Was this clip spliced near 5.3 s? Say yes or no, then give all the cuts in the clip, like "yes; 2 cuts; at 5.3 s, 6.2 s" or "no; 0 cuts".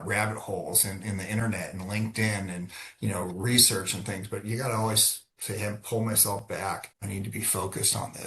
no; 1 cut; at 6.9 s